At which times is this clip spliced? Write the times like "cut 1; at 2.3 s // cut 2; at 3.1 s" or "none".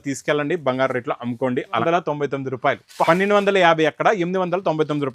cut 1; at 1.8 s

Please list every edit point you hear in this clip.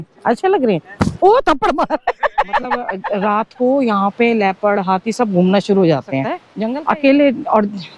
cut 1; at 3.0 s // cut 2; at 6.4 s

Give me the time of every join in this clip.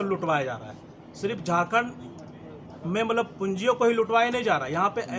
none

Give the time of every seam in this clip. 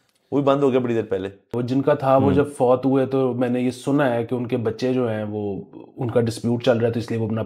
cut 1; at 1.6 s

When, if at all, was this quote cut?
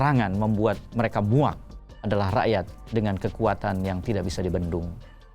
cut 1; at 1.8 s

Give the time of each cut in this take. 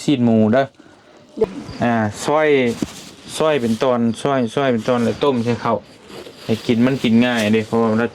cut 1; at 1.4 s

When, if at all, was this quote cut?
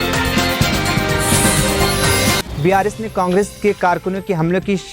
cut 1; at 2.4 s

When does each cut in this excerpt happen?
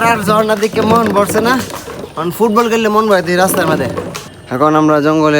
cut 1; at 4.5 s

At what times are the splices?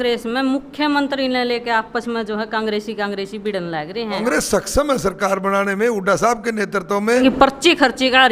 cut 1; at 4.0 s // cut 2; at 7.2 s

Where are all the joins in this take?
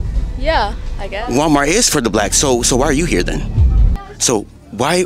cut 1; at 4.1 s

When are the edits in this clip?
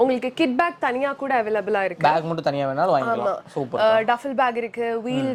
none

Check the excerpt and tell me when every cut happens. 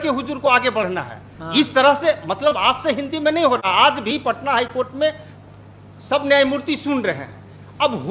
none

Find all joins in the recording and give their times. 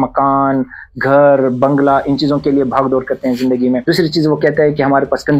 cut 1; at 3.8 s

